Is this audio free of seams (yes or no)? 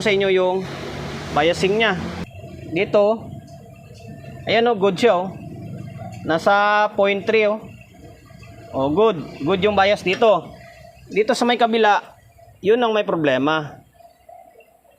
no